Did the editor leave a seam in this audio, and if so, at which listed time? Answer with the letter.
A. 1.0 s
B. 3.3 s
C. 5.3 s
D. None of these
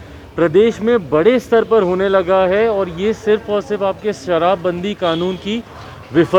D